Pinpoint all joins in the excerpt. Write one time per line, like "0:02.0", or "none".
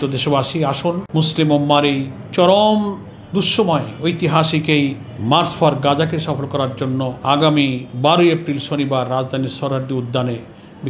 0:01.0
0:02.2
0:05.1
0:07.2
0:07.9